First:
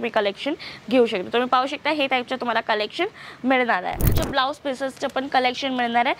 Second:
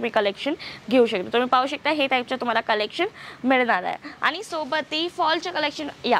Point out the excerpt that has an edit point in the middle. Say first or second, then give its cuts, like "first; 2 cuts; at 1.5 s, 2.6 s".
first; 1 cut; at 4.1 s